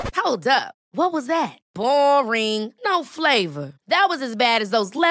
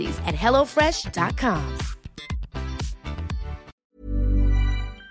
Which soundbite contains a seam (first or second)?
second